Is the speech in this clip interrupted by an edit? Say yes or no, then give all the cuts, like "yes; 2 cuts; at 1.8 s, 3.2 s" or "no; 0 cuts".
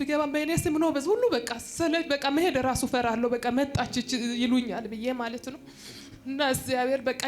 no; 0 cuts